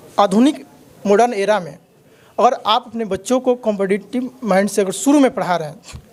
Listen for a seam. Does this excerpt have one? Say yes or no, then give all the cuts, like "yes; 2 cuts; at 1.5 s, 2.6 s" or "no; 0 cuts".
no; 0 cuts